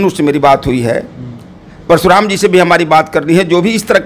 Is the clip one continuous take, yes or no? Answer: yes